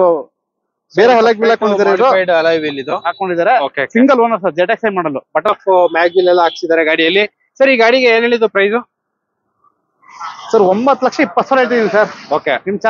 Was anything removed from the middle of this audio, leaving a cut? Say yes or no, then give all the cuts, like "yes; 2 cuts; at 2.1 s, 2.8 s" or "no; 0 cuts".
yes; 1 cut; at 5.5 s